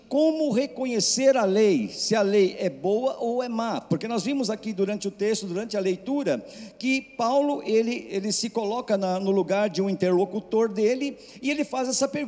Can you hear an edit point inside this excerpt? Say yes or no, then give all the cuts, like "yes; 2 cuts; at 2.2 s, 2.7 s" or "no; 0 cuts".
no; 0 cuts